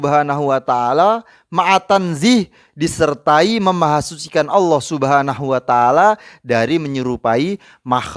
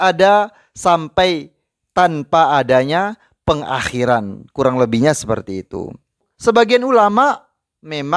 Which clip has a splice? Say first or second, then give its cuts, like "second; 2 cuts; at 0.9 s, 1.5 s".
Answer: second; 1 cut; at 6.3 s